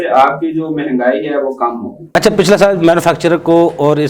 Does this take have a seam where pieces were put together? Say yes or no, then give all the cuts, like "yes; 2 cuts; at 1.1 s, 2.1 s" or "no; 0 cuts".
no; 0 cuts